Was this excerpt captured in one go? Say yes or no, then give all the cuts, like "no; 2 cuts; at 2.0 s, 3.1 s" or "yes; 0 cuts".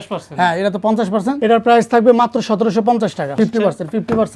no; 2 cuts; at 1.4 s, 3.4 s